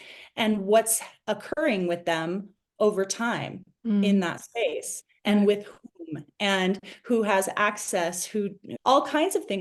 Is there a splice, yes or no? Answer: no